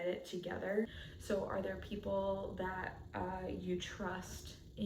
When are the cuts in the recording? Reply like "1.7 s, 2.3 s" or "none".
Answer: 1.0 s